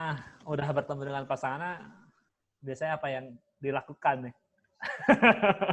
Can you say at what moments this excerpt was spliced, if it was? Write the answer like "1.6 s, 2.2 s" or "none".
none